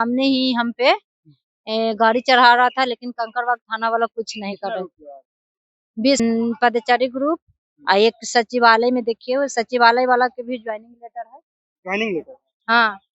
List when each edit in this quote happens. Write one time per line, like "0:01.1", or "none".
0:06.2

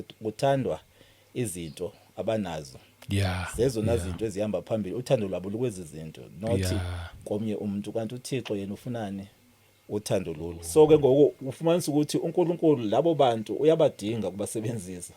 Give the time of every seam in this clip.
0:10.6

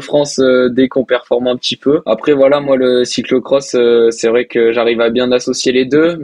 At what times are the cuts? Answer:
0:00.9
0:02.0

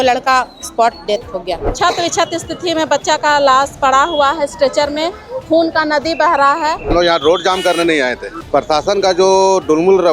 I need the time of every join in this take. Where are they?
0:01.6
0:06.9

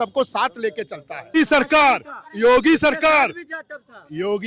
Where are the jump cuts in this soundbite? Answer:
0:01.4

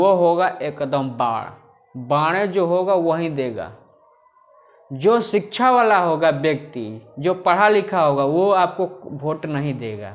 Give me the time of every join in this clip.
none

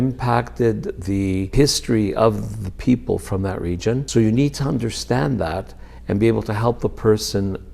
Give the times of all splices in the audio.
0:01.5
0:04.0

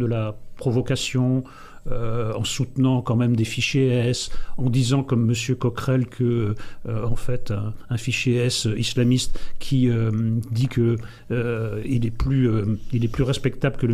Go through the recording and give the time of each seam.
none

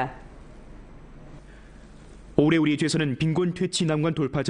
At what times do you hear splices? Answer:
0:03.3

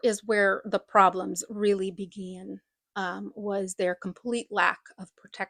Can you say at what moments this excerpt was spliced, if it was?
none

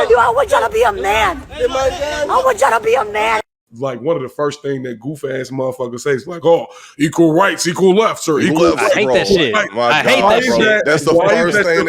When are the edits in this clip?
0:03.6
0:10.2

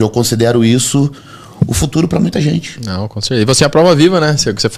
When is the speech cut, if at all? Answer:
none

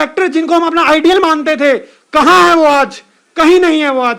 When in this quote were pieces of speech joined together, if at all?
none

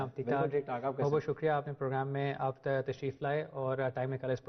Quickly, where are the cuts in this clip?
0:01.6

